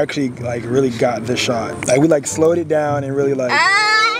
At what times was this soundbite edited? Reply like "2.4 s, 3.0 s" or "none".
1.7 s